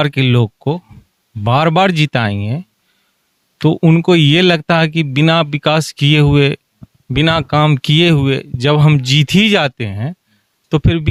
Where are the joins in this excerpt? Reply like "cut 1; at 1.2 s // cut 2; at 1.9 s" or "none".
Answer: none